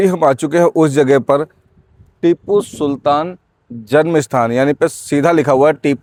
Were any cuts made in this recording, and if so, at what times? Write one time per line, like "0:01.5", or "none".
none